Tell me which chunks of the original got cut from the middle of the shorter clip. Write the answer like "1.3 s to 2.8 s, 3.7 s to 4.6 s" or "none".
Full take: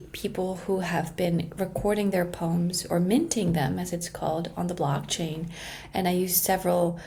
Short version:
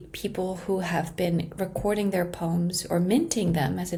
none